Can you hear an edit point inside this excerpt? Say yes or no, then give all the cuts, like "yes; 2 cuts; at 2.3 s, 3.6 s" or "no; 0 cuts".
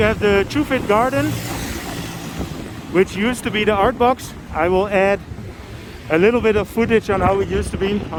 no; 0 cuts